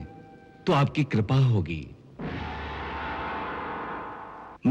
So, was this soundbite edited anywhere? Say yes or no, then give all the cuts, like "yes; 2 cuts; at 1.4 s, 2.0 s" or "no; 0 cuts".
no; 0 cuts